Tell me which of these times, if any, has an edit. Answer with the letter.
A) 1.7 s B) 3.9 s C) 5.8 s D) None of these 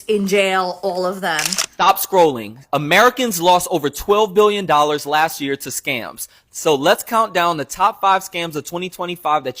A